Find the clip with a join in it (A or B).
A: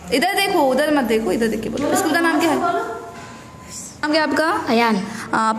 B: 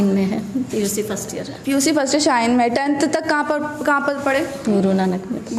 A